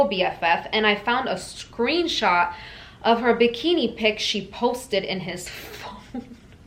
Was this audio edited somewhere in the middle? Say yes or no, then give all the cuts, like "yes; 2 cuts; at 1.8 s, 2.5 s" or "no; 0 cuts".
no; 0 cuts